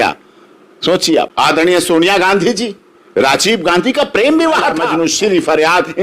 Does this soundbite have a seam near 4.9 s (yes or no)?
yes